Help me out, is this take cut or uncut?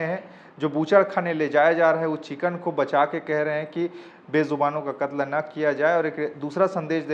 uncut